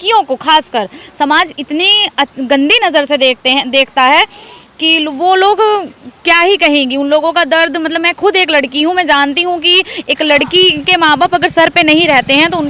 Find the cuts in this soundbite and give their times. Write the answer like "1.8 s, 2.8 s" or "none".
none